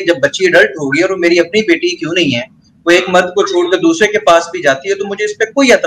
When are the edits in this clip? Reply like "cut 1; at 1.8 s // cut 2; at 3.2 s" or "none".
none